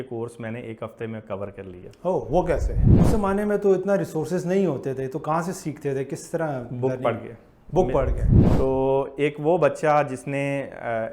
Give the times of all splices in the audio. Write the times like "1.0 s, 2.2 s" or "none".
2.8 s, 8.3 s